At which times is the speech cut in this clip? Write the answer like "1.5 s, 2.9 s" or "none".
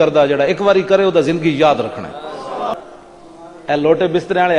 2.7 s